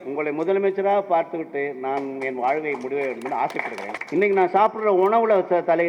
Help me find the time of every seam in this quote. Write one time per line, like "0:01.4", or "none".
0:04.0